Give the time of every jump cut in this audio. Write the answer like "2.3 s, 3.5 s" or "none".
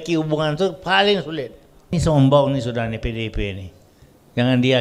2.0 s